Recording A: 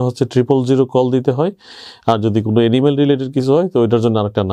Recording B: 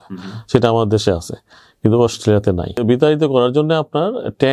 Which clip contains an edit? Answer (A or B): B